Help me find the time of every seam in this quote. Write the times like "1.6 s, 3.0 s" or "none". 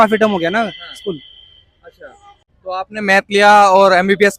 2.4 s